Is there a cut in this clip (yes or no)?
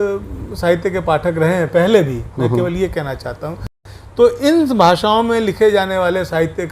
yes